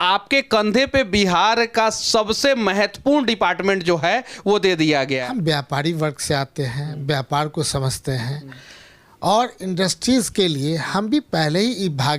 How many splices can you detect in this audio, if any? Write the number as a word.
one